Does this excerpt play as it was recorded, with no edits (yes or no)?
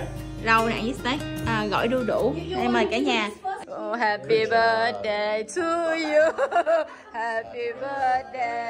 no